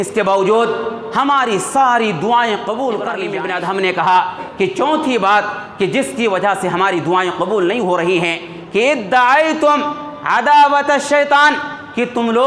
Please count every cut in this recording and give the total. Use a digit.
1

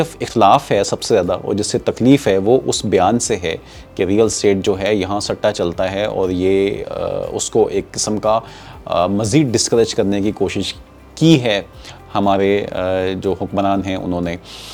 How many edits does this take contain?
0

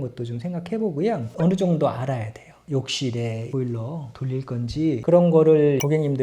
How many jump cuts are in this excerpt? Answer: 1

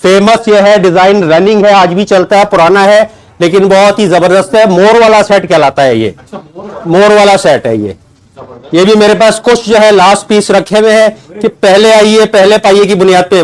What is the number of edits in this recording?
0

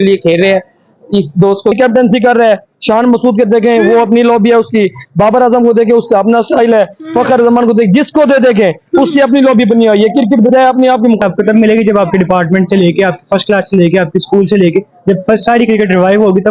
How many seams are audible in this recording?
2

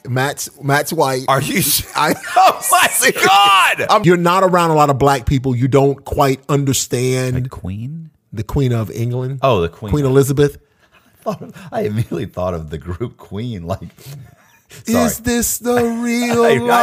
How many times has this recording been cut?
1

